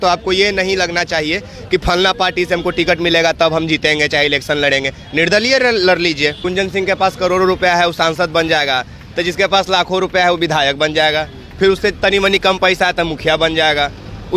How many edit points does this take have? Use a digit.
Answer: 1